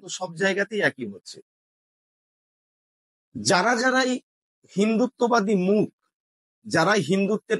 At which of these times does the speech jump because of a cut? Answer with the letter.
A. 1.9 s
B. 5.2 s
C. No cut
C